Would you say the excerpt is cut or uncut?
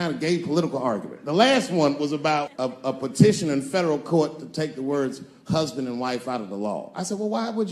cut